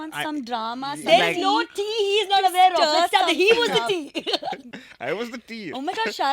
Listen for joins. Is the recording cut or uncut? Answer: cut